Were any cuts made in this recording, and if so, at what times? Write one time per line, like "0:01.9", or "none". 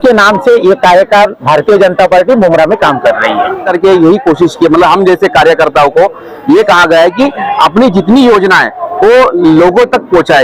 0:03.6

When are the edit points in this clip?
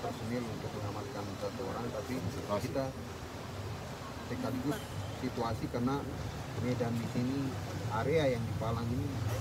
none

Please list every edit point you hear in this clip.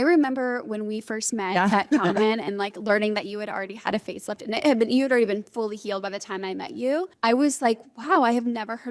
0:07.1

